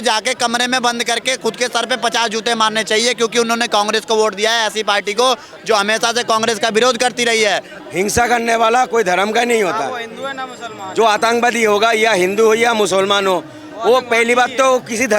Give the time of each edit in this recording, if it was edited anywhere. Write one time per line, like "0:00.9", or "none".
0:07.7

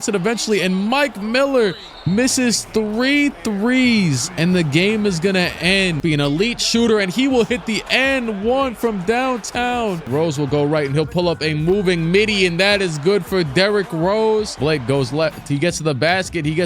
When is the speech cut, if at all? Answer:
0:06.0
0:10.0
0:14.5

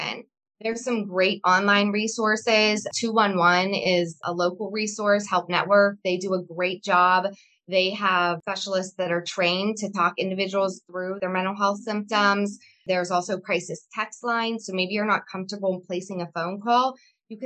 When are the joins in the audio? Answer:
0:11.2

